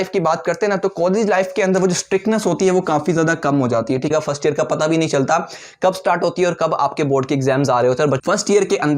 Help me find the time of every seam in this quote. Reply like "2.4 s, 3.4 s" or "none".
4.1 s, 8.2 s